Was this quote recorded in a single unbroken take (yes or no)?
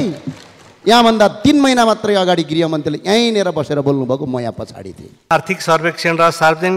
no